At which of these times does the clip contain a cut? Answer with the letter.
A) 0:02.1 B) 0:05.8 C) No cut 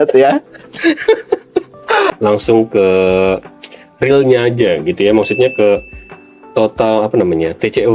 A